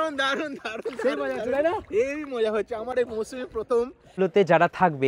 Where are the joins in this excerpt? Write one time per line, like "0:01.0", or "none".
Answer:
0:04.1